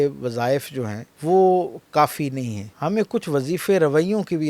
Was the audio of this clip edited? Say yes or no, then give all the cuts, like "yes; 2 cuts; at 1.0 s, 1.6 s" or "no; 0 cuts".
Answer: yes; 2 cuts; at 1.0 s, 2.6 s